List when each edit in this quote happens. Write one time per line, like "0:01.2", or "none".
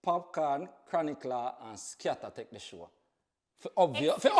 none